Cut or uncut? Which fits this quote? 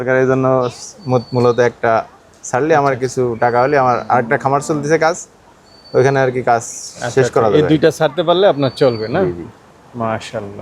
uncut